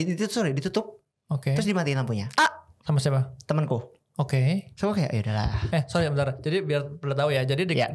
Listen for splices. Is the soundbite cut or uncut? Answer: uncut